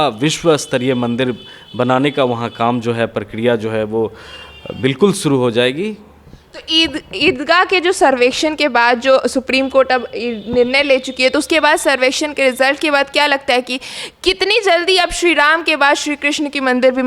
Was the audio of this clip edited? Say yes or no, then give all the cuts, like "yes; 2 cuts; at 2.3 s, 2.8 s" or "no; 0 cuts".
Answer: no; 0 cuts